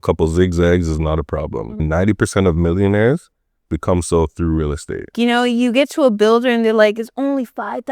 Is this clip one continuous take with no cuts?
no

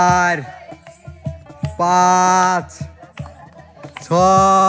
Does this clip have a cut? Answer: no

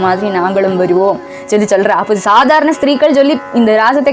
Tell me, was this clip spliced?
no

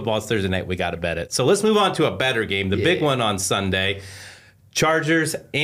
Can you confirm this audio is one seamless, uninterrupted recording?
yes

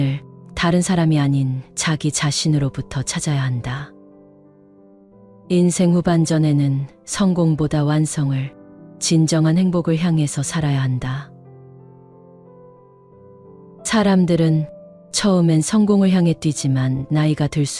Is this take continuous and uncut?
no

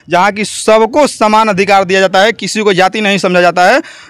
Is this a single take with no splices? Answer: yes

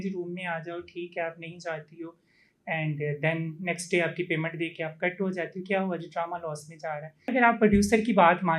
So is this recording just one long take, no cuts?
no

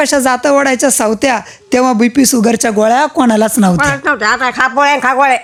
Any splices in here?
no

